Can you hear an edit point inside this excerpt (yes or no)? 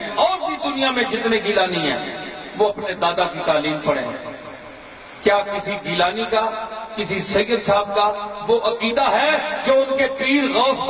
no